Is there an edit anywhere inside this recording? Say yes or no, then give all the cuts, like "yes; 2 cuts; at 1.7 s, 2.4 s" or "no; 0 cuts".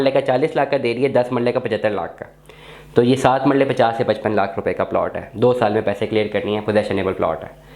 no; 0 cuts